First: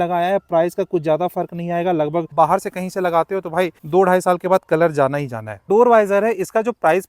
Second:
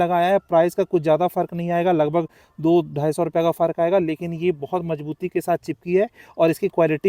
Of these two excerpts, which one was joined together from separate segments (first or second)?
first